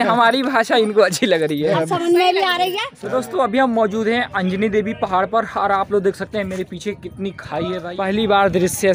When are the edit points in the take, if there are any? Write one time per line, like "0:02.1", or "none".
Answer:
0:02.9
0:07.8